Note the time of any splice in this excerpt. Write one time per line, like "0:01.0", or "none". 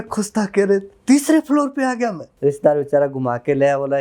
0:02.3